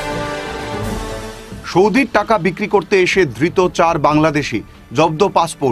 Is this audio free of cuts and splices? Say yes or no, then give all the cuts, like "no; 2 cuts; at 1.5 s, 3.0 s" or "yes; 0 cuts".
yes; 0 cuts